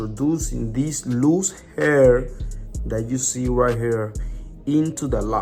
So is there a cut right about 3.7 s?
no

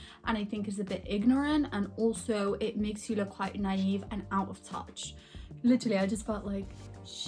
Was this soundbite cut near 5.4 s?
yes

